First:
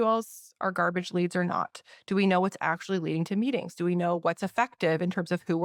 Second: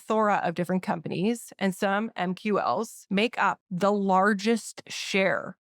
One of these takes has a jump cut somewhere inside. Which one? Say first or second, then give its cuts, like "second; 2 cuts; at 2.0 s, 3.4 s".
second; 1 cut; at 3.4 s